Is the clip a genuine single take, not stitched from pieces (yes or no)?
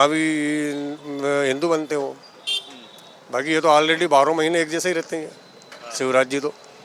yes